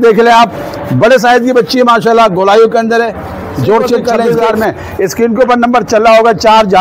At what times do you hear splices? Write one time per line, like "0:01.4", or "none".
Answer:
0:04.2